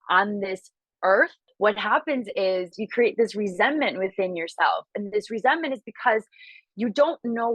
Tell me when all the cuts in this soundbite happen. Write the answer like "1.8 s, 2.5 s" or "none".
1.4 s, 2.8 s